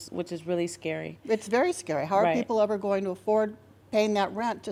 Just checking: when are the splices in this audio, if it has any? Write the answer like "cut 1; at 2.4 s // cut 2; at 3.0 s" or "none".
none